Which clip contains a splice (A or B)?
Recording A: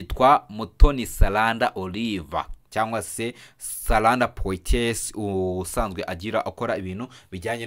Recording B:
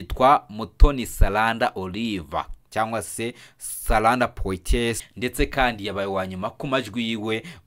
B